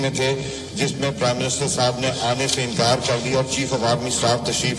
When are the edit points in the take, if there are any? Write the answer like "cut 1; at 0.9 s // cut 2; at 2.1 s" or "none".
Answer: none